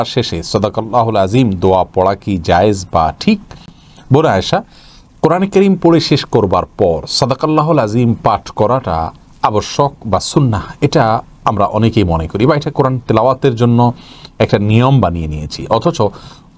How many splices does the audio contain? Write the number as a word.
zero